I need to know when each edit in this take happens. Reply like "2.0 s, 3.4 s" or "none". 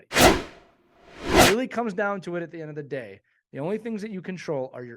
1.4 s